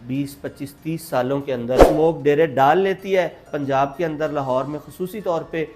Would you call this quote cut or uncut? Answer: cut